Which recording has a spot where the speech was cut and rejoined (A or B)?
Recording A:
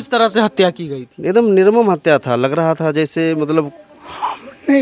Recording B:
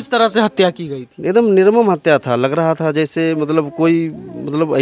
A